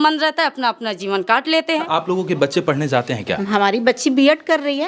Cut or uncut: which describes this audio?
cut